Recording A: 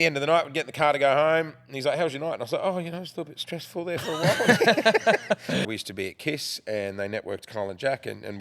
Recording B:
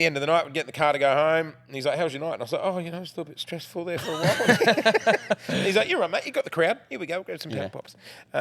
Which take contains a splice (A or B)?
A